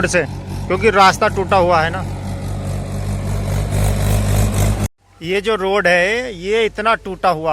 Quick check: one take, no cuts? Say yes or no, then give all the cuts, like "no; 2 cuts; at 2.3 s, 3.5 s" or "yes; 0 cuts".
no; 1 cut; at 5.1 s